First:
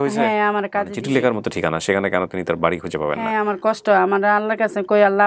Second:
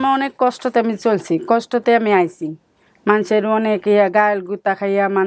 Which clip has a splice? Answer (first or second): first